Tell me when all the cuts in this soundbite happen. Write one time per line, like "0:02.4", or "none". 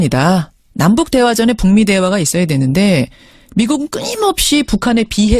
0:02.4

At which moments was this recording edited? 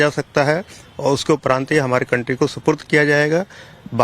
0:02.8

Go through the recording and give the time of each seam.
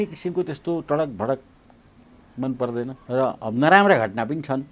0:03.0

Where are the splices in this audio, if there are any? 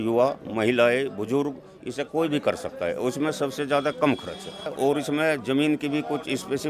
0:04.7

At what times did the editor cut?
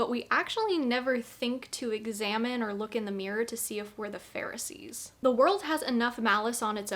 0:05.0

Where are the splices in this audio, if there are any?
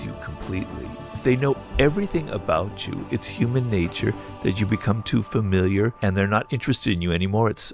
0:01.2
0:06.0

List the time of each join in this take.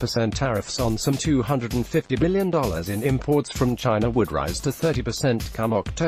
none

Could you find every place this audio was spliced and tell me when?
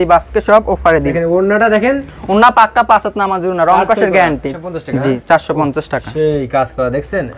0:01.1
0:04.5

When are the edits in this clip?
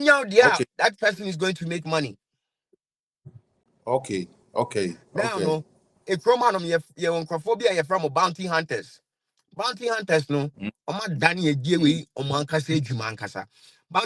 none

